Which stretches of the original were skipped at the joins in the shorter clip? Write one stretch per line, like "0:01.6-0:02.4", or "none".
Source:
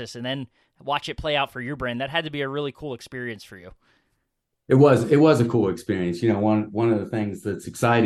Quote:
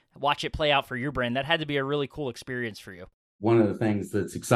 0:04.0-0:06.7